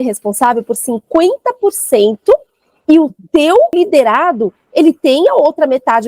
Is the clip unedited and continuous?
no; 1 cut; at 3.7 s

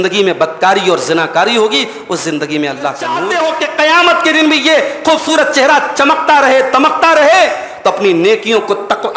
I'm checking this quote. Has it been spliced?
yes; 1 cut; at 3.2 s

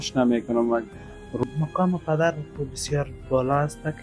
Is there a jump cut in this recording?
yes; 1 cut; at 1.4 s

